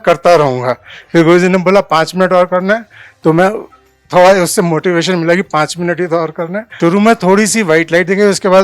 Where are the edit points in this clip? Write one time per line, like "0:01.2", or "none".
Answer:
0:06.6